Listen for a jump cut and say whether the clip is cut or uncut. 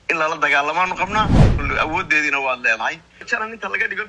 cut